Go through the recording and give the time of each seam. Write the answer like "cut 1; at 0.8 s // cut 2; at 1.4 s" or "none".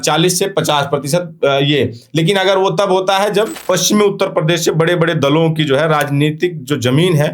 cut 1; at 3.6 s